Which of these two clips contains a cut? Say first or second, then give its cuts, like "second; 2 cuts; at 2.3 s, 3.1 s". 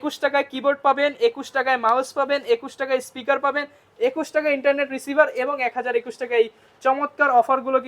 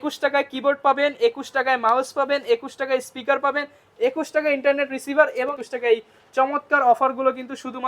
second; 1 cut; at 5.6 s